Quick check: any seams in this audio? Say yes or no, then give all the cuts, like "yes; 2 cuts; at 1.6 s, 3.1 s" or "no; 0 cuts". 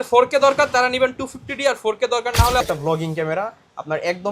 yes; 1 cut; at 2.6 s